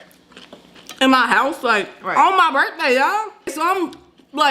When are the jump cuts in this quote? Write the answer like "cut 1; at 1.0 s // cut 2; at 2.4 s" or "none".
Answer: cut 1; at 3.5 s